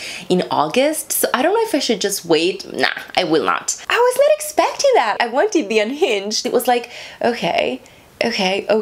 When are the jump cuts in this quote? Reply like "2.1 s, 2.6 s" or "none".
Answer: 3.9 s, 6.4 s